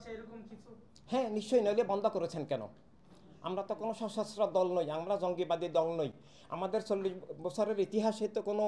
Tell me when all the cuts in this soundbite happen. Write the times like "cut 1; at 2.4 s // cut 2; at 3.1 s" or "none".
none